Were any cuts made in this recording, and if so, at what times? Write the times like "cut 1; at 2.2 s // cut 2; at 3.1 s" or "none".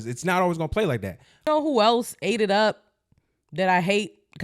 cut 1; at 1.4 s